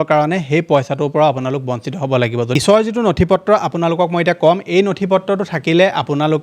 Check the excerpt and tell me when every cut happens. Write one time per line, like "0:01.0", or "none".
0:02.5

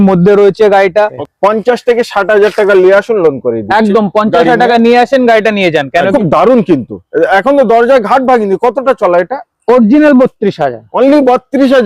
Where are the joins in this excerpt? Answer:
0:01.2
0:06.1

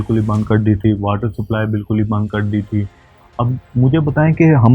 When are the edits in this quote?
none

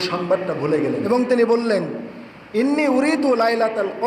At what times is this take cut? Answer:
0:01.1

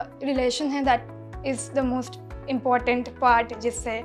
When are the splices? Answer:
none

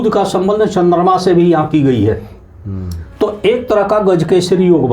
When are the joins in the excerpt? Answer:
none

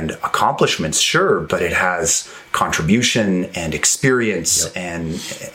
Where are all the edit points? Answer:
0:01.4

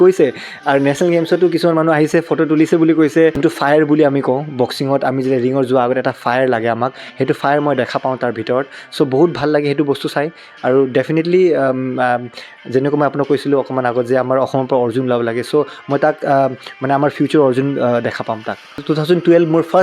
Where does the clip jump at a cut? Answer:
0:03.4
0:18.8

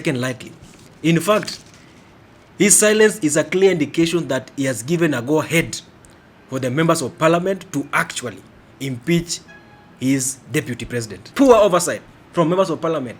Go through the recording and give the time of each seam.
0:11.3

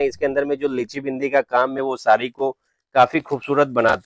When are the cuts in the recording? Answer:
none

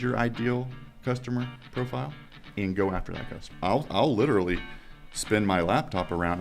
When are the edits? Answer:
0:03.5

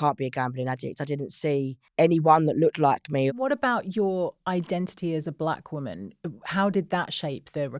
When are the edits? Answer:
0:01.8
0:03.3

